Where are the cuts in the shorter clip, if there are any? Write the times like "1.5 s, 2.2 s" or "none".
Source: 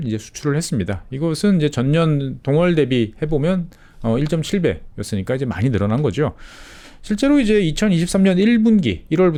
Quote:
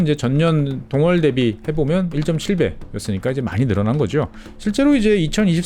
2.2 s, 4.4 s